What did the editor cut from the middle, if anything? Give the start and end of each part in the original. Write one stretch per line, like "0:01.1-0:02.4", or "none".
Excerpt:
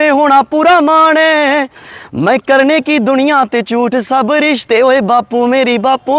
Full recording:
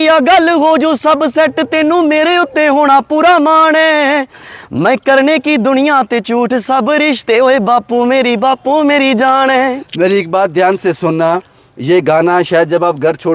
none